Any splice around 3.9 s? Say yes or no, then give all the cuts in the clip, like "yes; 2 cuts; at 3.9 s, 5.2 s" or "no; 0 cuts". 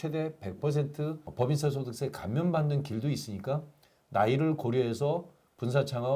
no; 1 cut; at 1.2 s